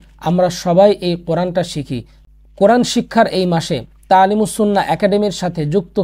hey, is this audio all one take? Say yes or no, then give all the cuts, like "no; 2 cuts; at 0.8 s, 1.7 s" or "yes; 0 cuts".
yes; 0 cuts